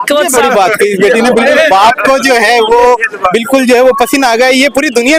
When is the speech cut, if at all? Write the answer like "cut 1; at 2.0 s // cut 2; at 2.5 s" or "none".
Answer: none